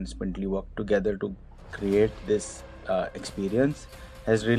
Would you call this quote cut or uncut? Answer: uncut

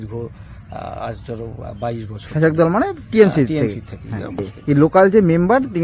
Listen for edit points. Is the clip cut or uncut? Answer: cut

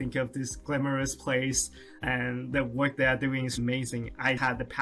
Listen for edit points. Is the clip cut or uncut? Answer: uncut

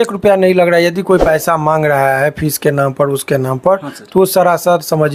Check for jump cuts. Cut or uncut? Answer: uncut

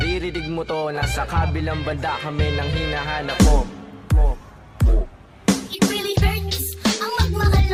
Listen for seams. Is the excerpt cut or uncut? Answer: uncut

